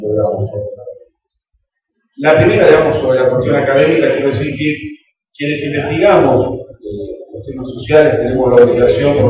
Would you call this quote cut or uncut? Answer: cut